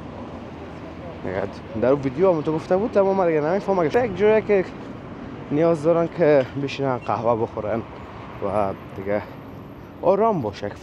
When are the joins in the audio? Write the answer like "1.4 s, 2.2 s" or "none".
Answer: 3.9 s